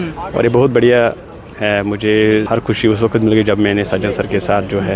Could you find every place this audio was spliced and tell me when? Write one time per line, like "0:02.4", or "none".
0:02.5